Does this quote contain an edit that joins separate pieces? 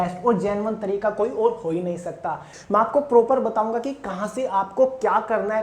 yes; 1 cut; at 2.5 s

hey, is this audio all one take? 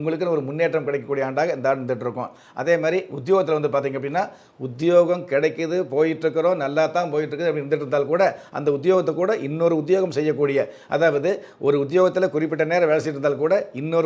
yes; 0 cuts

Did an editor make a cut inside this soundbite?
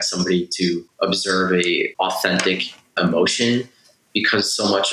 yes; 3 cuts; at 0.9 s, 1.9 s, 3.0 s

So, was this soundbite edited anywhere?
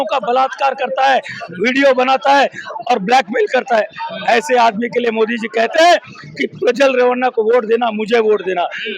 no; 0 cuts

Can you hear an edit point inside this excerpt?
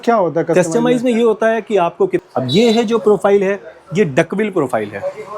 yes; 1 cut; at 2.2 s

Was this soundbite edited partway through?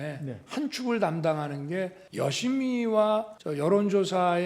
yes; 2 cuts; at 2.0 s, 3.4 s

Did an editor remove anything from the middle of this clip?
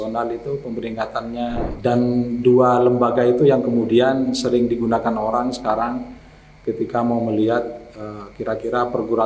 yes; 1 cut; at 1.7 s

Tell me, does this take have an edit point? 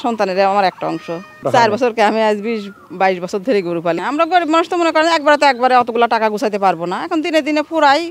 yes; 2 cuts; at 1.4 s, 4.0 s

